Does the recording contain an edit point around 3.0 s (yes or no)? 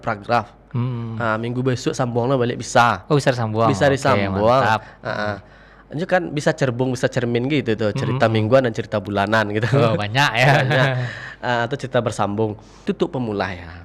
no